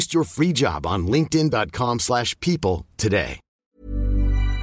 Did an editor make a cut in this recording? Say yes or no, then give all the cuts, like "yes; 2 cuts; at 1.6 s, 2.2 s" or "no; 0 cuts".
yes; 1 cut; at 3.7 s